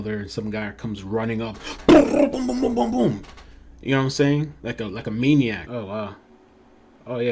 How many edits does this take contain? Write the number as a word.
one